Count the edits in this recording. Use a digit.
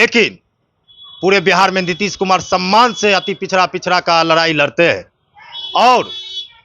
0